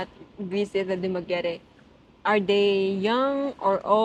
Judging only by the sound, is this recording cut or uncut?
uncut